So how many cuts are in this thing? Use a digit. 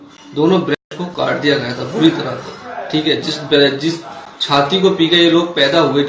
0